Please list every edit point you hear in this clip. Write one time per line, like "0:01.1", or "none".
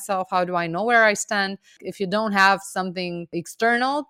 0:01.8
0:03.3